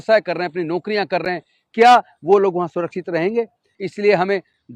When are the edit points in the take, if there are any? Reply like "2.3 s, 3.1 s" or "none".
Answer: 3.6 s